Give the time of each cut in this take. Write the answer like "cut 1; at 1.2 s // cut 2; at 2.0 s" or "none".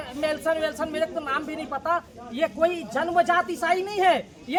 none